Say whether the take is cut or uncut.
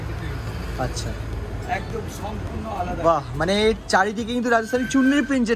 uncut